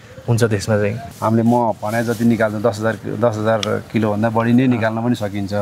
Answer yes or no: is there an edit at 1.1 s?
yes